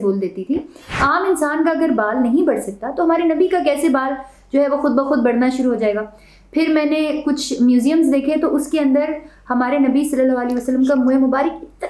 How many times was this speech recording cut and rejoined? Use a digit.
1